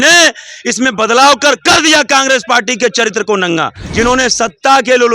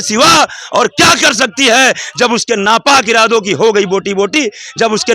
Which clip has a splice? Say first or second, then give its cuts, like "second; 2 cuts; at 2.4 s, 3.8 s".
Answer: first; 1 cut; at 3.8 s